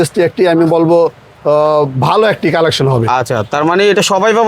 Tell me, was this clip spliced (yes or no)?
no